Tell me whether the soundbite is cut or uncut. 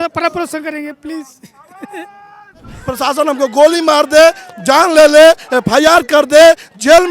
cut